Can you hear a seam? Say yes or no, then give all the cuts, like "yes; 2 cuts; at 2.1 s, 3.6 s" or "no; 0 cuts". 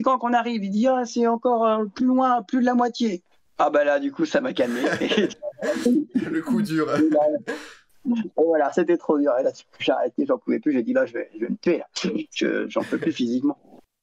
no; 0 cuts